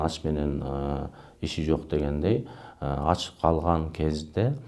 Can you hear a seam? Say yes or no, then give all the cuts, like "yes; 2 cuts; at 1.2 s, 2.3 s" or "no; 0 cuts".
no; 0 cuts